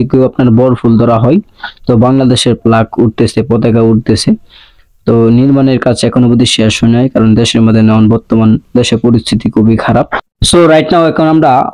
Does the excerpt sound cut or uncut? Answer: uncut